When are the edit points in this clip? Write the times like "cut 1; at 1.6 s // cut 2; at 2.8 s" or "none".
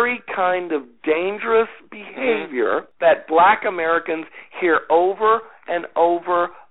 cut 1; at 2.9 s